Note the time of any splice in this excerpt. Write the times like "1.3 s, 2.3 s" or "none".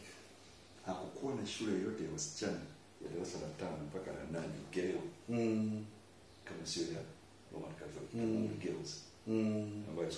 none